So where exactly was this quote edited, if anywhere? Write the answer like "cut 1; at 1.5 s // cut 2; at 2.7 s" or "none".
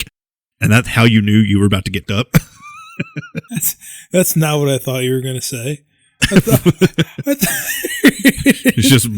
cut 1; at 2.0 s